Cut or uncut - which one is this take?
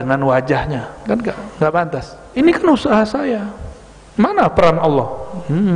cut